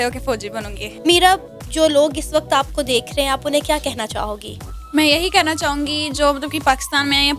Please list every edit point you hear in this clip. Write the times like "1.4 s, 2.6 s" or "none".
none